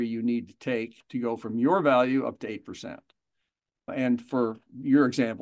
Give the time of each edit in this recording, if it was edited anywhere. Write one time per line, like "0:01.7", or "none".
0:03.9

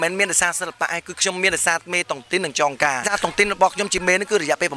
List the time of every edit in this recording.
0:03.0

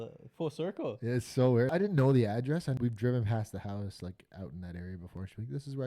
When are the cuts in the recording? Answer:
0:01.7
0:02.8

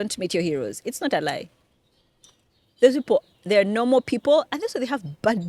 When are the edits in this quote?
none

